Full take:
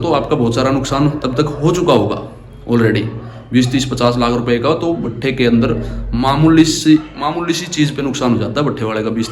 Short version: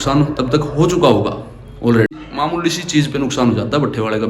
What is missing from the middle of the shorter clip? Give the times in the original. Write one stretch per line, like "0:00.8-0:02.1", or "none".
0:03.1-0:07.1